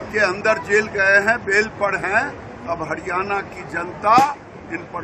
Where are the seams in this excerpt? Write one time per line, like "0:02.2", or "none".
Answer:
none